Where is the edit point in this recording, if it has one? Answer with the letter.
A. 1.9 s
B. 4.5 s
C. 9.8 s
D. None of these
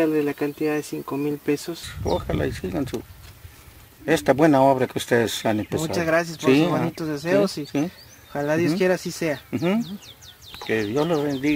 A